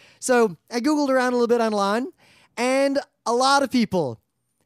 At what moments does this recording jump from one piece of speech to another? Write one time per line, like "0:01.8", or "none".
0:03.3